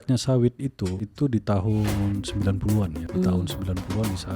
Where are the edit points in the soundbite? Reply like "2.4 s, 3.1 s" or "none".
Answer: 1.0 s, 3.0 s